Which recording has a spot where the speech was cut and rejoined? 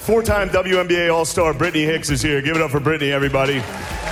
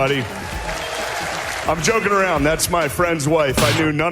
second; 1 cut; at 1.7 s

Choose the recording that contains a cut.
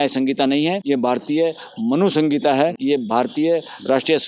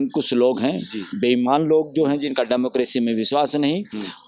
first; 2 cuts; at 0.8 s, 2.8 s

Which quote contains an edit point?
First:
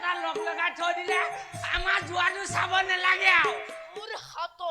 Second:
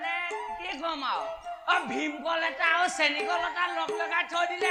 first; 1 cut; at 3.8 s

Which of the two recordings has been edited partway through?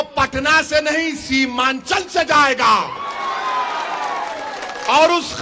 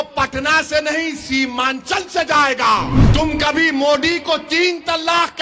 second; 1 cut; at 3.0 s

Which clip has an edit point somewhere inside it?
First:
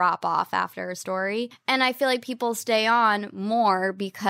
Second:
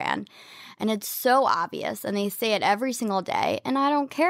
first; 1 cut; at 1.5 s

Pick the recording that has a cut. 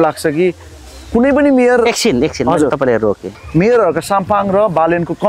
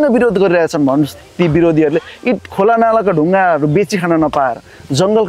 first; 1 cut; at 3.4 s

